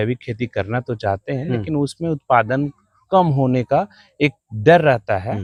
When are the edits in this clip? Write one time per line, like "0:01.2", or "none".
none